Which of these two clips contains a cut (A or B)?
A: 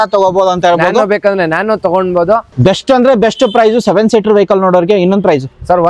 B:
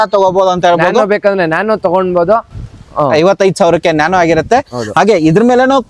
A